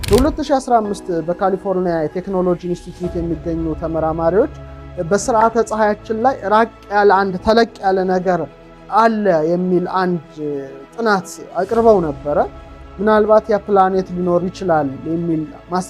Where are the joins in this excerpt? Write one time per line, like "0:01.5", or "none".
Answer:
none